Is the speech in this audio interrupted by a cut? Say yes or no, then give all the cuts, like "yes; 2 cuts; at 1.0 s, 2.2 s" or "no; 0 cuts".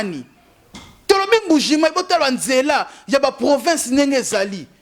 no; 0 cuts